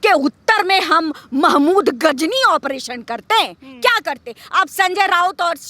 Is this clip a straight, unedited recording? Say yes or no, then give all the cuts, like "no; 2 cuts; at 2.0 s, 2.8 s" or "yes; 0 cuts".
yes; 0 cuts